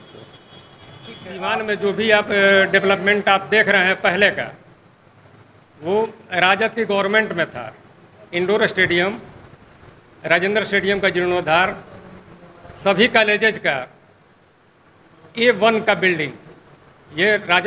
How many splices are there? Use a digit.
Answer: 1